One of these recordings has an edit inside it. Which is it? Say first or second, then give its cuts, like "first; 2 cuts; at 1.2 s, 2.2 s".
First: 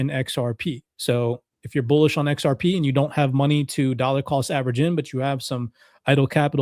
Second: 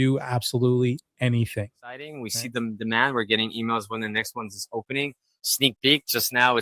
second; 1 cut; at 2.3 s